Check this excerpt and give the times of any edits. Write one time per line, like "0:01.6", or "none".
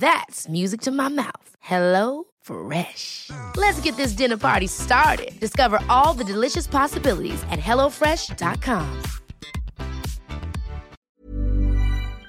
0:11.0